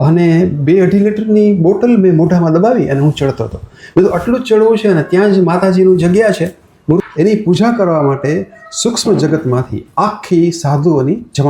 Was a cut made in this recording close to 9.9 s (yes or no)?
no